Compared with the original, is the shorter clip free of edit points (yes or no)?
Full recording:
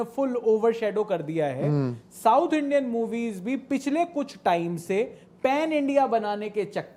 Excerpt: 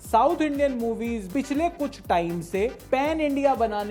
no